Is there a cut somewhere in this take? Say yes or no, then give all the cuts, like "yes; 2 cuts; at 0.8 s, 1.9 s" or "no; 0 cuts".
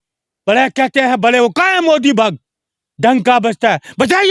no; 0 cuts